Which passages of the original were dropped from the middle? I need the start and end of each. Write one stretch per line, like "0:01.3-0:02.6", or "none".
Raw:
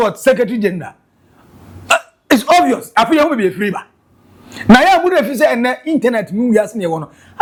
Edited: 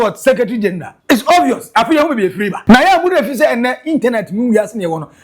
0:00.9-0:02.1
0:03.8-0:04.5